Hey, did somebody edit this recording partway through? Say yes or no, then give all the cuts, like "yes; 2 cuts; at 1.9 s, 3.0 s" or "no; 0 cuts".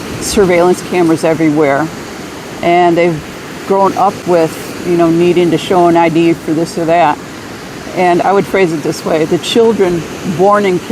yes; 1 cut; at 8.2 s